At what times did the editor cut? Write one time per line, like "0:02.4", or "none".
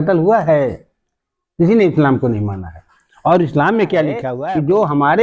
0:04.3

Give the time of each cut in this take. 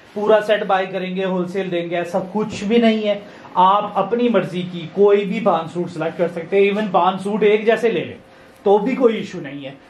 none

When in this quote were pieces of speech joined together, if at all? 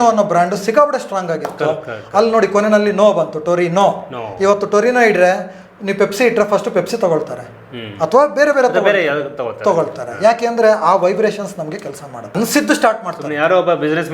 0:12.3

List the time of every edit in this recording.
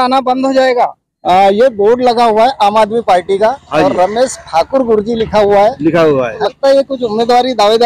0:01.1
0:06.4

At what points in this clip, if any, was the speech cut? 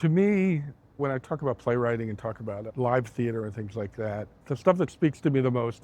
0:01.0
0:02.7
0:04.3

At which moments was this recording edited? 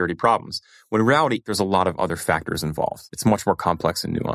0:01.5
0:03.1

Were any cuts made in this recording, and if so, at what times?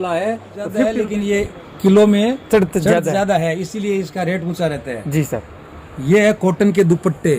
0:01.0

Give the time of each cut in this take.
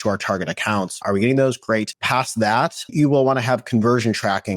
0:01.0
0:02.0
0:02.9

